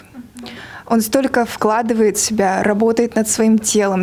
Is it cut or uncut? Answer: uncut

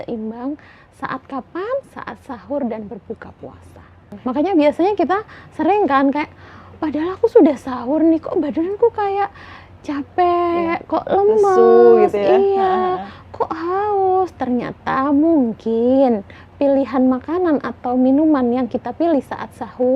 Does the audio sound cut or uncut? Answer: cut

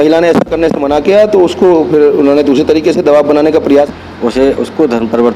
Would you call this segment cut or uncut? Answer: cut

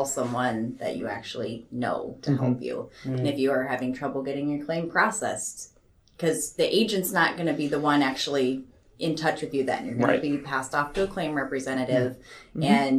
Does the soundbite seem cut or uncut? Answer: uncut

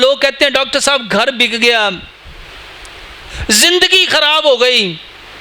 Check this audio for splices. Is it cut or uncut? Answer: uncut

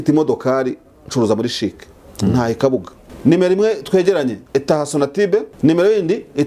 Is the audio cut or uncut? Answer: cut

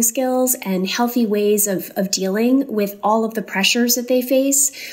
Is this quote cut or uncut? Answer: uncut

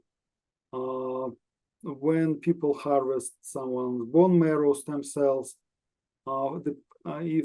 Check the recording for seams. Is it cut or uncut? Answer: uncut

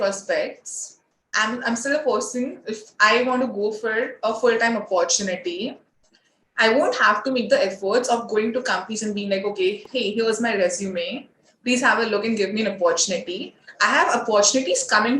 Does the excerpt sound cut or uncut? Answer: cut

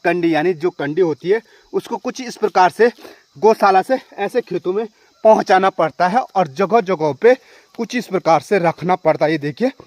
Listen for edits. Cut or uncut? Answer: uncut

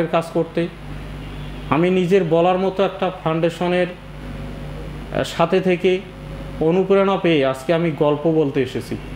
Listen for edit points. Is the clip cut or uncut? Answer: uncut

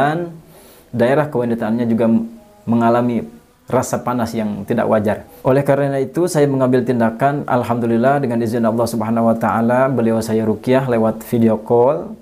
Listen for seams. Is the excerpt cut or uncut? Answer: cut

